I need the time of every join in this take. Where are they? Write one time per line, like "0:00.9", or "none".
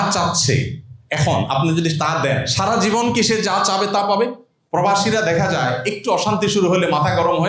0:04.5